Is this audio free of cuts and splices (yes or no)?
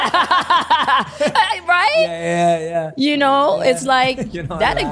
yes